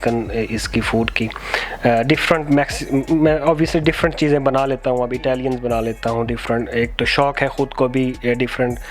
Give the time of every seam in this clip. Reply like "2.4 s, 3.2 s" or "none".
none